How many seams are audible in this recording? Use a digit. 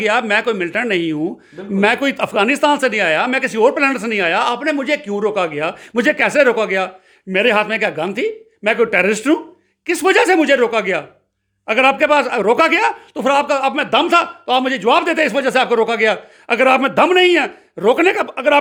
0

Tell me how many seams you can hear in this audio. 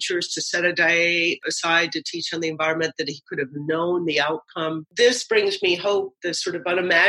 3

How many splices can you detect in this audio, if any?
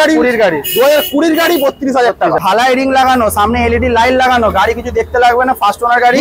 1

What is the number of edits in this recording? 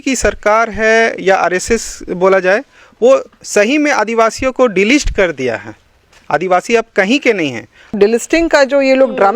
1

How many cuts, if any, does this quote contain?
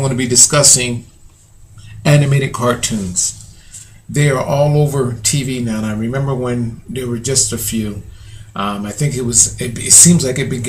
0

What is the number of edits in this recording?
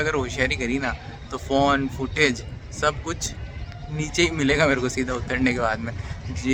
0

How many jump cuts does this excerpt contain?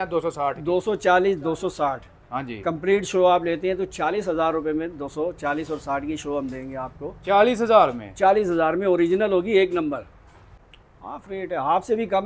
1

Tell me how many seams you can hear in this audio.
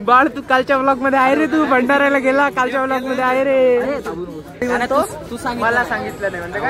1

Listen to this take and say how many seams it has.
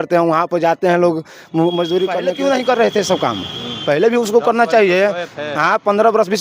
1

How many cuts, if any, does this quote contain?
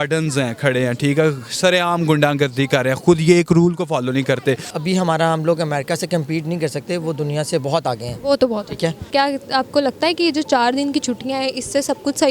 2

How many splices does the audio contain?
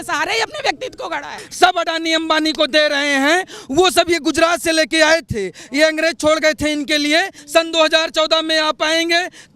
2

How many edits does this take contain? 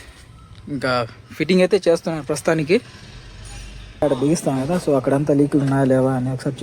1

